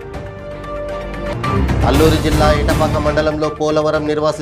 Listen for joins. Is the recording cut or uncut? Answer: cut